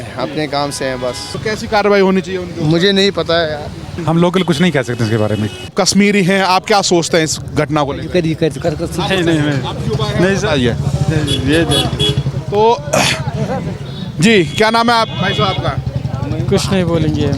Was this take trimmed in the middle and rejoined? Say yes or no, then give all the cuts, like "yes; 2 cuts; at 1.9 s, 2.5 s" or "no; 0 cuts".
yes; 3 cuts; at 1.3 s, 3.9 s, 5.7 s